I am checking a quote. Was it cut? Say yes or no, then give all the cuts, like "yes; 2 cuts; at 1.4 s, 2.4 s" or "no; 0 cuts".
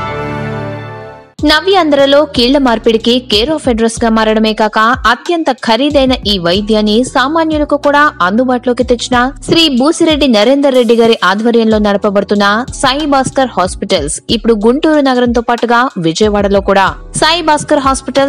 yes; 1 cut; at 1.2 s